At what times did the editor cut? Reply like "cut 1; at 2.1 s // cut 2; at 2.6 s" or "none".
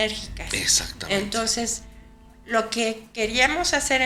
none